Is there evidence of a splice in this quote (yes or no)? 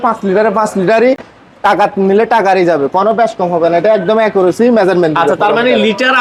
no